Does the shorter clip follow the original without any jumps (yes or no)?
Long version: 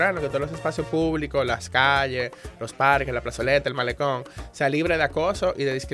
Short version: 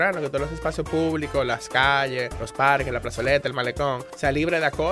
no